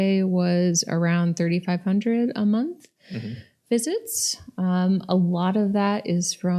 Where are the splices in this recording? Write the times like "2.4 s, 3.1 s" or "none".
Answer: none